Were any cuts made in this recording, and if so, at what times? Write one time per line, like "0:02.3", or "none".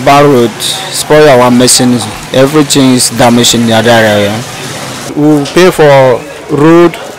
0:05.1